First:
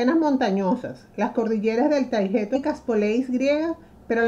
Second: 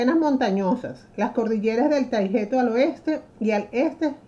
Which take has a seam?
second; 1 cut; at 2.6 s

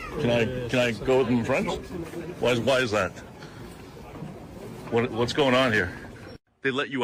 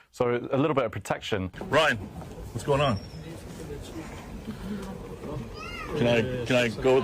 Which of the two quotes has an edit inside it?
second; 1 cut; at 1.5 s

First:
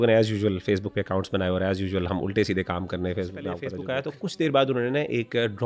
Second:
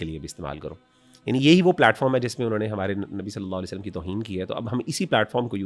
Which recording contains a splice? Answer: first; 1 cut; at 3.8 s

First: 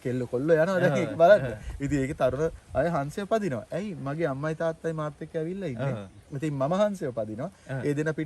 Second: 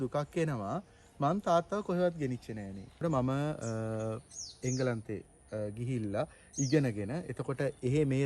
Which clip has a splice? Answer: second; 1 cut; at 3.0 s

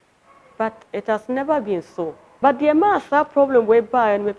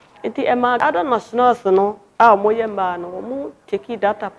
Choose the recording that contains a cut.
first; 2 cuts; at 0.8 s, 2.2 s

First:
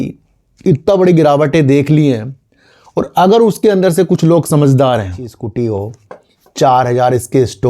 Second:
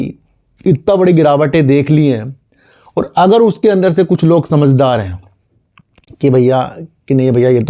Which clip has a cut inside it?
first; 1 cut; at 5.4 s

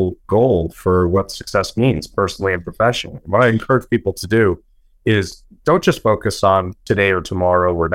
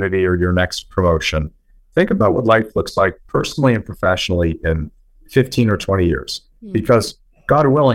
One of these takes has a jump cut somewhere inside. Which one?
first; 1 cut; at 6.7 s

